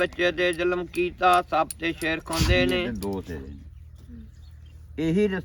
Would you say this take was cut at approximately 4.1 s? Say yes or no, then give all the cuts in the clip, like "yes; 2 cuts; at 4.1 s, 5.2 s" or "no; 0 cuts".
no; 1 cut; at 2.7 s